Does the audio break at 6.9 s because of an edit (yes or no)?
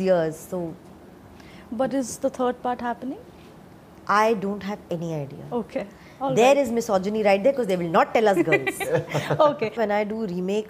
no